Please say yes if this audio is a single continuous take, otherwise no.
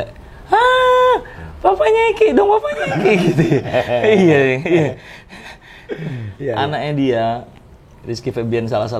yes